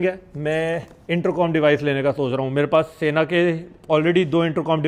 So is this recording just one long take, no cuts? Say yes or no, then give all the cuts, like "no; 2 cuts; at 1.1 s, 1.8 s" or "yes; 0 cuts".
yes; 0 cuts